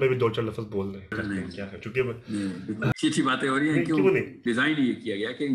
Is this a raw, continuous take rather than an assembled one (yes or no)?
no